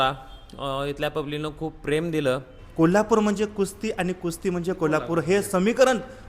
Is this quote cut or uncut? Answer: cut